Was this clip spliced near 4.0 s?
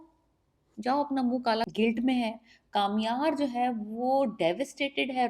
no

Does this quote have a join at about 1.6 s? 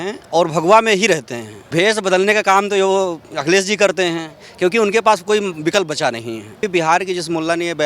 yes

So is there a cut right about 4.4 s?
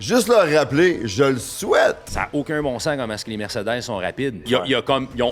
yes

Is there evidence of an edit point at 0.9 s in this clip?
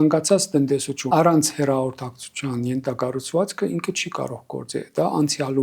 yes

